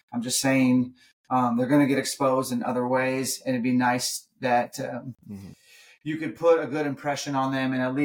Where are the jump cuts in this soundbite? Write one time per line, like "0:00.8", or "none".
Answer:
none